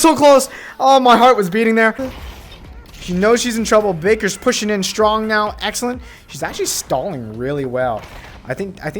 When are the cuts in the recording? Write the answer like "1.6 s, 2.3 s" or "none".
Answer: 2.0 s